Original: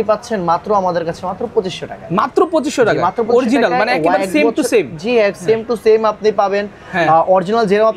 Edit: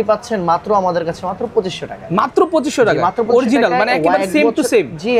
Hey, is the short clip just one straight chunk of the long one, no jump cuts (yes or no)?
yes